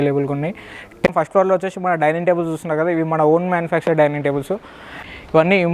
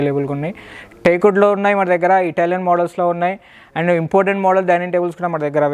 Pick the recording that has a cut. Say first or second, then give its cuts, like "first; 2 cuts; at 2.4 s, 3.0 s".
first; 2 cuts; at 1.0 s, 4.8 s